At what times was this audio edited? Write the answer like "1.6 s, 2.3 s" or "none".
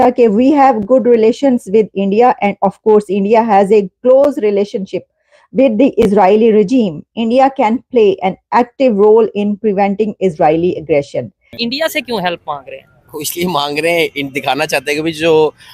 11.6 s